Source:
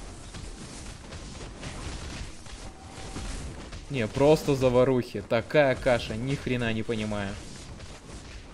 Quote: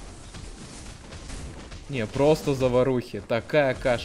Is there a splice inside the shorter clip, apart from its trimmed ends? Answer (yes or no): yes